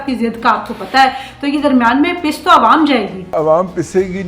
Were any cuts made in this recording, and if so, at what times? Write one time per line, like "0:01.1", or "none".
0:03.3